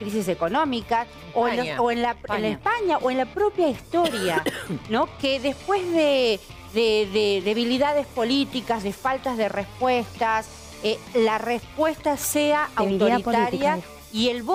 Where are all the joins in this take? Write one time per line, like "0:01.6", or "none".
none